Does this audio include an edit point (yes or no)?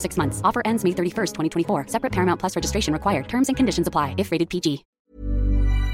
yes